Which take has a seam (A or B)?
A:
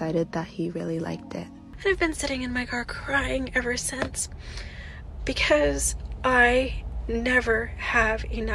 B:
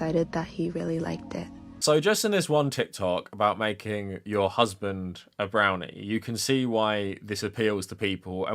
A